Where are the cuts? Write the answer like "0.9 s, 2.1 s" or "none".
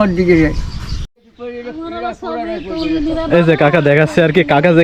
1.3 s